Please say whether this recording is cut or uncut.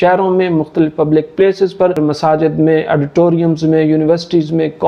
cut